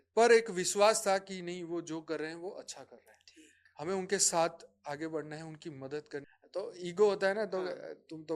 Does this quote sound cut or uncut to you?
cut